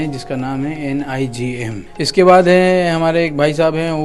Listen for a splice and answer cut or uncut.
cut